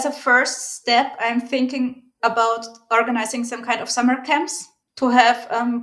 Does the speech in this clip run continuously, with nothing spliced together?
no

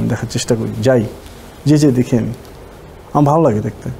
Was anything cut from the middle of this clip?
no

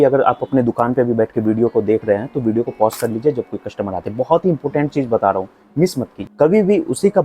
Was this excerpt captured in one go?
no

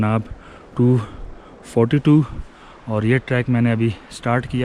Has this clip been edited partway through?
no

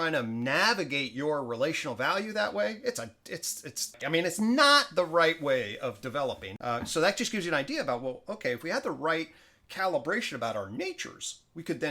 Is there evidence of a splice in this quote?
yes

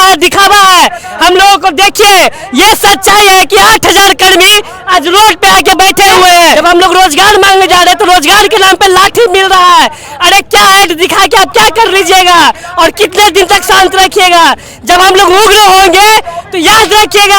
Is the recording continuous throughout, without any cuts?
no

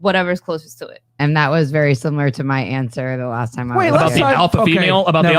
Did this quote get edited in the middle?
yes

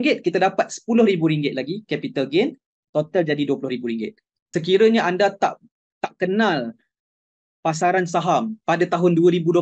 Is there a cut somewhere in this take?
yes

